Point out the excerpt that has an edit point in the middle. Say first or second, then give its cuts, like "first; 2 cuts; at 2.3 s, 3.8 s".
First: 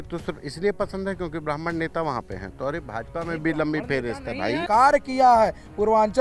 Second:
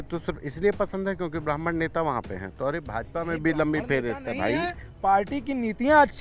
first; 1 cut; at 4.6 s